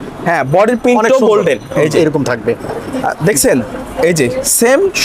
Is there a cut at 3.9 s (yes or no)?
no